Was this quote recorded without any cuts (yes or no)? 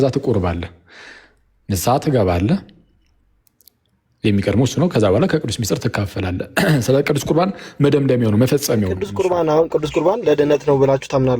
no